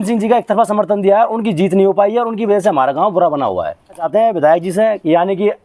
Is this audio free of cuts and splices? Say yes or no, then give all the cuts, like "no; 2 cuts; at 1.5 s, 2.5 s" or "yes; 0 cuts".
no; 1 cut; at 4.1 s